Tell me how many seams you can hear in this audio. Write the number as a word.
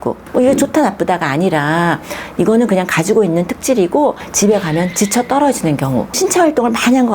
two